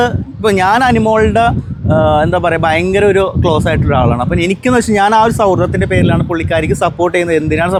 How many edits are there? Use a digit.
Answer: 0